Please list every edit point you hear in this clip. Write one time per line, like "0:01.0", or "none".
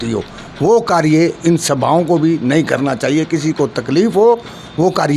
none